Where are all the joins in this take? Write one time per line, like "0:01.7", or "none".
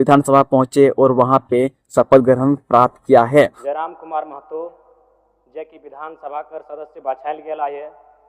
0:03.6

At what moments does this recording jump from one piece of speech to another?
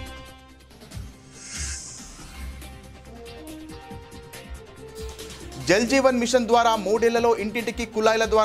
none

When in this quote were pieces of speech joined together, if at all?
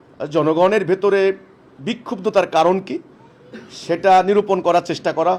none

